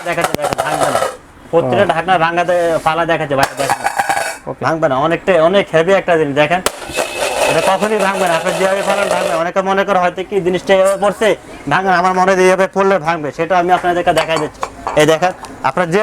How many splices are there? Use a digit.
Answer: 0